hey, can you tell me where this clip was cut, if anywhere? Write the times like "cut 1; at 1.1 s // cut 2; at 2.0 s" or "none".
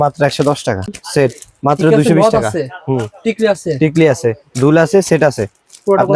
cut 1; at 1.0 s